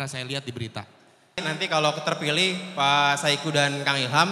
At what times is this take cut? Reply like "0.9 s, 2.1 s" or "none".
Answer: 1.4 s

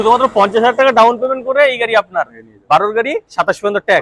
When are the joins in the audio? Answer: none

